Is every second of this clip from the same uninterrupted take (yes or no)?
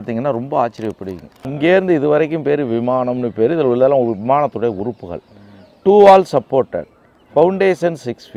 no